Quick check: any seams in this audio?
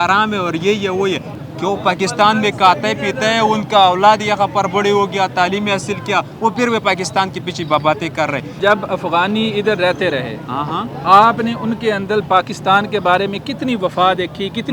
no; 0 cuts

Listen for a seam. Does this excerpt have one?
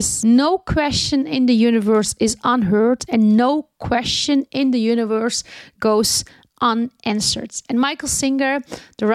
no; 0 cuts

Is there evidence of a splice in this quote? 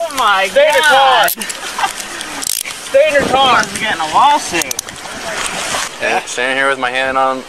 yes; 1 cut; at 5.9 s

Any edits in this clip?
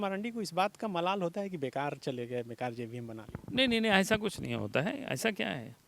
no; 0 cuts

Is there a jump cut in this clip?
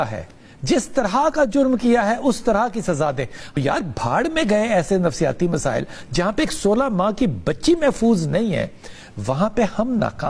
yes; 1 cut; at 3.6 s

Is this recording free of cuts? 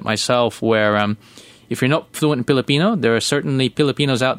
yes; 0 cuts

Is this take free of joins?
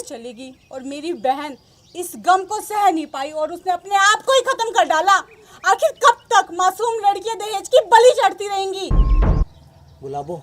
no; 1 cut; at 9.5 s

